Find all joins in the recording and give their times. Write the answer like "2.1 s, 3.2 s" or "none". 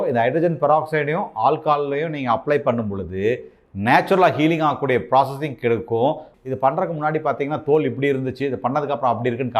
6.3 s